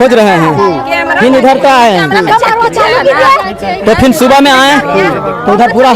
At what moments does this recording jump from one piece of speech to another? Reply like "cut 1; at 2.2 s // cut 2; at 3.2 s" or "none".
none